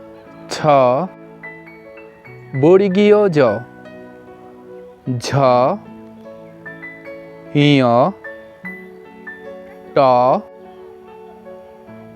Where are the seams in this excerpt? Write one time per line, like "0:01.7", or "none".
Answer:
0:01.1
0:02.5
0:03.6
0:05.0
0:05.8
0:07.2